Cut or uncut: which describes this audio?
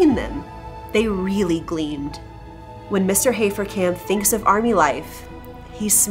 cut